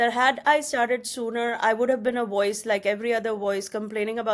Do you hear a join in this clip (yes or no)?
no